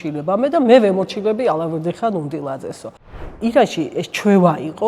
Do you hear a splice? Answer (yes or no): yes